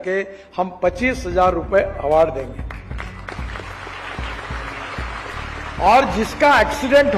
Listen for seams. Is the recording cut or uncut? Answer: uncut